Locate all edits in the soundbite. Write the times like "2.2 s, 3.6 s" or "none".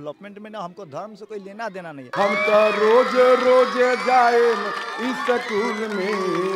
2.0 s